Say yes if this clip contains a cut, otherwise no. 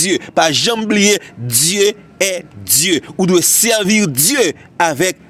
no